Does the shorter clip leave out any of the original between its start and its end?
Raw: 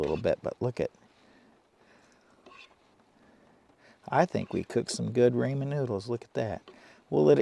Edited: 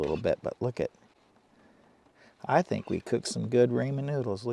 yes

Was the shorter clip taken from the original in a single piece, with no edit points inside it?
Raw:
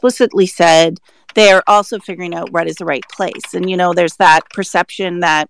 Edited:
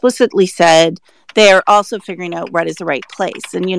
yes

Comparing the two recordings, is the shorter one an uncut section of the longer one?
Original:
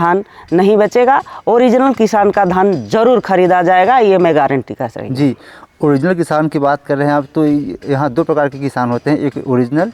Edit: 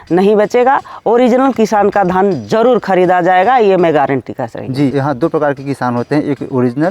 no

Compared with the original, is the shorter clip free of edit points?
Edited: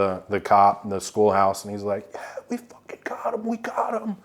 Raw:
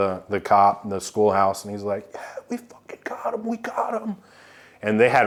yes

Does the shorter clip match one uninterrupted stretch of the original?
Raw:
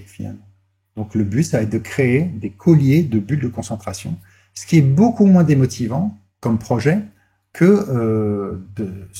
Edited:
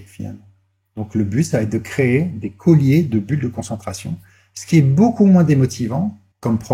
yes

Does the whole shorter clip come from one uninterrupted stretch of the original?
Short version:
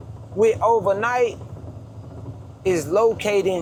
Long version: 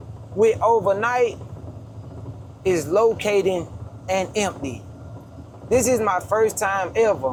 yes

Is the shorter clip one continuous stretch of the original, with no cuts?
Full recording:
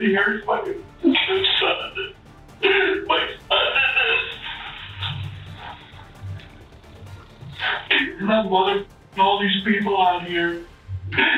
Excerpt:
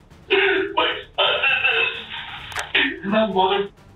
no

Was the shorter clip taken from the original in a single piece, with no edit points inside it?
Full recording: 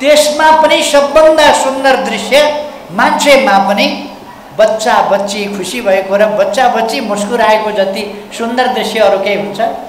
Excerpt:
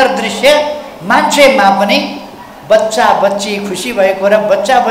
yes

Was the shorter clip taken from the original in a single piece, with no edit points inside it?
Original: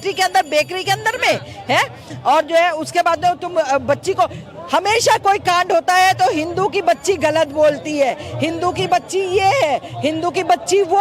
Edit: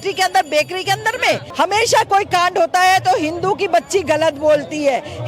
no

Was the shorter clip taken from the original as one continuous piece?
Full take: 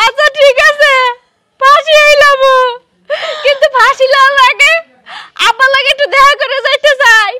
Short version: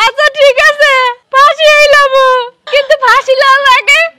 no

